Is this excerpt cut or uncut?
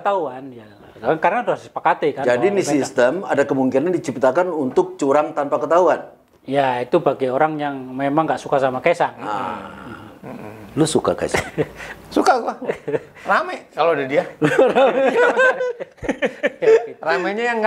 uncut